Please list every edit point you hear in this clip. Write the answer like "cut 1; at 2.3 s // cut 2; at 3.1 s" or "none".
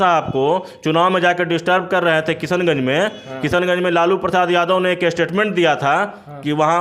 none